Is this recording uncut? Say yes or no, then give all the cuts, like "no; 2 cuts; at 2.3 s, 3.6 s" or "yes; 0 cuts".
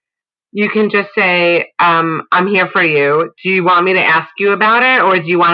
yes; 0 cuts